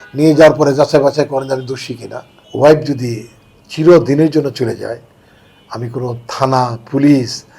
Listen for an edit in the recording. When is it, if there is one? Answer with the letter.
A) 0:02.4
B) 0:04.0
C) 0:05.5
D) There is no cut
A